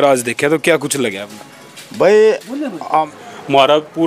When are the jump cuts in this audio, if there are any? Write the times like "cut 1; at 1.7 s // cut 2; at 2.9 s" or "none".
cut 1; at 2.9 s

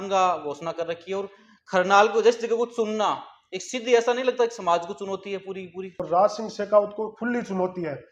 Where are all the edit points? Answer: cut 1; at 5.9 s

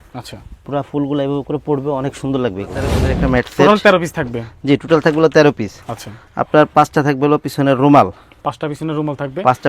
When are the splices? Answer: cut 1; at 3.0 s

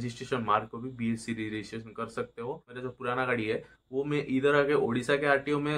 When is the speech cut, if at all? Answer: cut 1; at 2.5 s

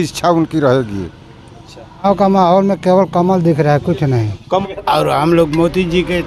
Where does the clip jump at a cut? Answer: cut 1; at 2.0 s // cut 2; at 4.6 s

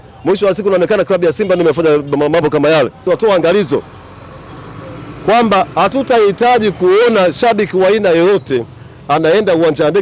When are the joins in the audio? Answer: cut 1; at 3.0 s

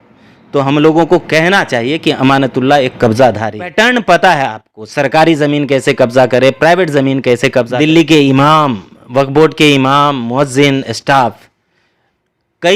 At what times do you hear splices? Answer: cut 1; at 3.5 s // cut 2; at 7.7 s

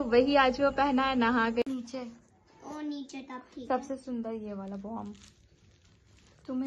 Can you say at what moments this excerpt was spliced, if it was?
cut 1; at 1.6 s

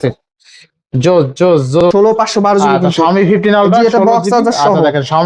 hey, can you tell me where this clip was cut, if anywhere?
cut 1; at 1.8 s

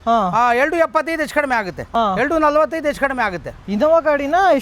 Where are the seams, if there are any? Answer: cut 1; at 1.9 s // cut 2; at 3.5 s

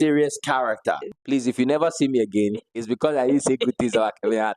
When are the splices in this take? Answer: cut 1; at 1.0 s

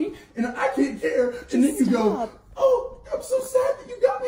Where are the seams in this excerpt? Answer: none

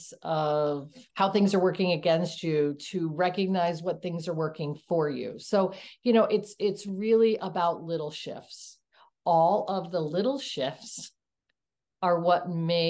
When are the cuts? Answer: cut 1; at 1.0 s

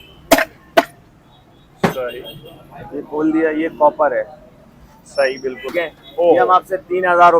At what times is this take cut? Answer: cut 1; at 5.7 s

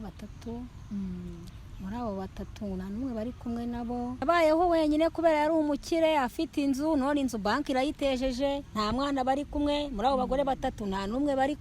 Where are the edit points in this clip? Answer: cut 1; at 4.2 s

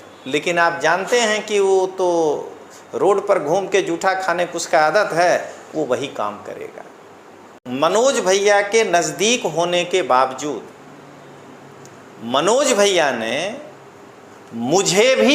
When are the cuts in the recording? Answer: cut 1; at 7.6 s

